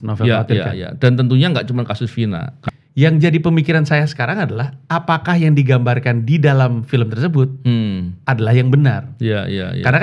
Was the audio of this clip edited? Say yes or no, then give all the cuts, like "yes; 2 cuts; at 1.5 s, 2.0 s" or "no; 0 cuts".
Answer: yes; 1 cut; at 2.6 s